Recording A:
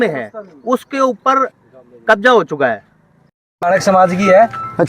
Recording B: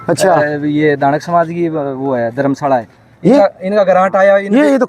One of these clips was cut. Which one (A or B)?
A